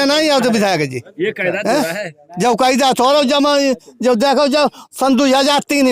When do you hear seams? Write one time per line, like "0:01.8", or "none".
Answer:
none